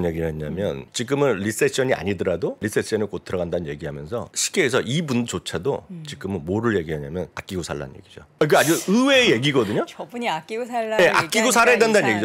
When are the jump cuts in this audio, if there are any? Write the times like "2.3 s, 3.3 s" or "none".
0.9 s, 2.7 s, 4.4 s, 7.8 s